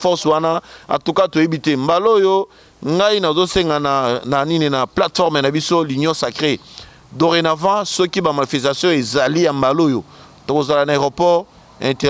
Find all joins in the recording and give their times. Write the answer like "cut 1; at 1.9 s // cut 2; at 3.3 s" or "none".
none